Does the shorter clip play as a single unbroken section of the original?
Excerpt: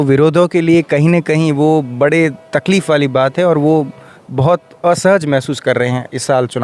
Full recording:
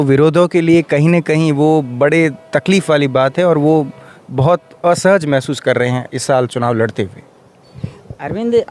yes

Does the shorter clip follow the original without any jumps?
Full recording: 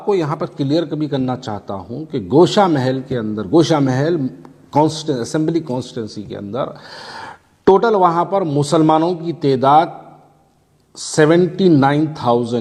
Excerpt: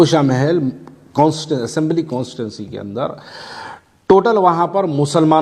yes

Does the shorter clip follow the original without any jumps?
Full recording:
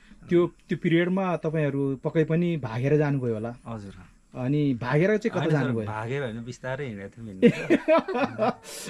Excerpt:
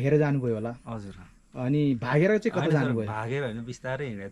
yes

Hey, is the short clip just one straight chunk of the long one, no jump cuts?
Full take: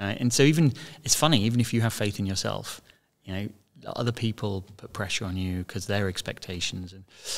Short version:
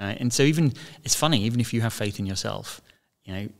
yes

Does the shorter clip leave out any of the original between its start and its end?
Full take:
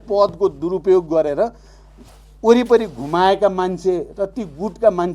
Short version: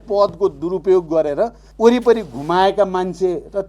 yes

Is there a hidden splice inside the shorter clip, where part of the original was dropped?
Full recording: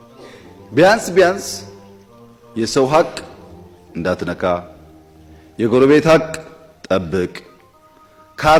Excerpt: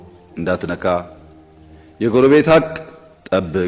no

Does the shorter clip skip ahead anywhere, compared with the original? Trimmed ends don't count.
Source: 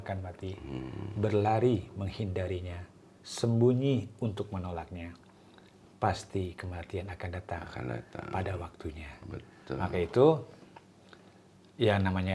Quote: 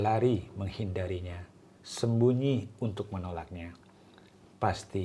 no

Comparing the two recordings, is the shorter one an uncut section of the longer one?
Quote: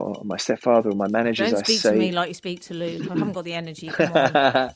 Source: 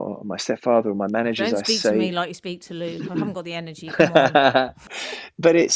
yes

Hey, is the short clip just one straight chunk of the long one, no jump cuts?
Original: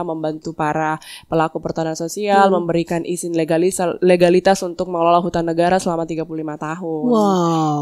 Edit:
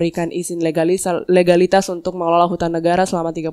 yes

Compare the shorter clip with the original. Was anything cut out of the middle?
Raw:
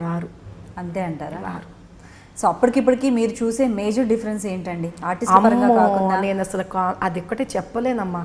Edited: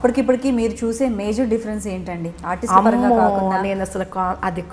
no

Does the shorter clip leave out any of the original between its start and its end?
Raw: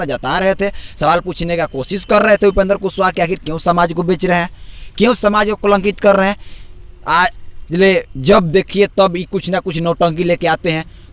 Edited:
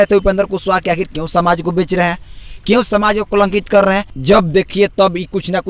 yes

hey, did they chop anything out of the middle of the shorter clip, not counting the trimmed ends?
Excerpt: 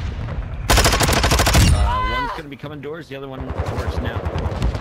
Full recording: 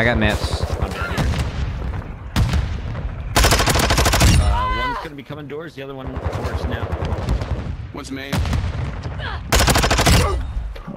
no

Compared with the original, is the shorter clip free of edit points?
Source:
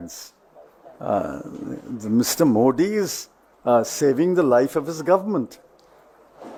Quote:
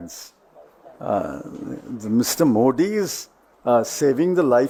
yes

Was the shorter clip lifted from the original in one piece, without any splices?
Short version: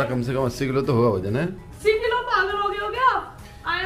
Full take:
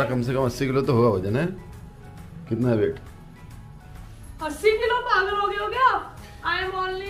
no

